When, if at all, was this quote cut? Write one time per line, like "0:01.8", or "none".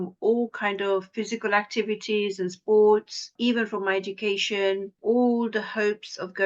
0:03.3
0:04.9